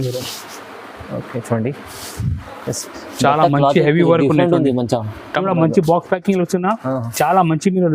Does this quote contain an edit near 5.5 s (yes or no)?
yes